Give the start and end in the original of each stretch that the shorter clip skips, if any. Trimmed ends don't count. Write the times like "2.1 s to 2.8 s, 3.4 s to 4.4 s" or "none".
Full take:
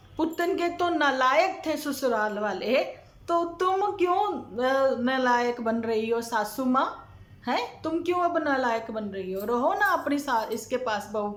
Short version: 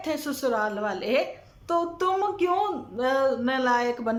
none